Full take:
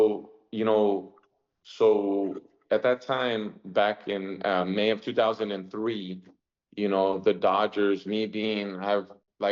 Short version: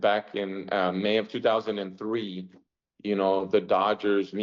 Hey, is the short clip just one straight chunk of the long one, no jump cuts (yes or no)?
yes